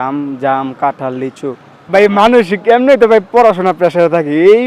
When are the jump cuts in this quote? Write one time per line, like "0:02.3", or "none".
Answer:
0:01.7